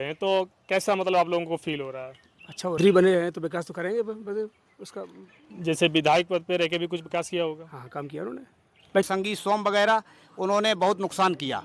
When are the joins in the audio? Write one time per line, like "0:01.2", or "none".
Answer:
0:02.8
0:09.1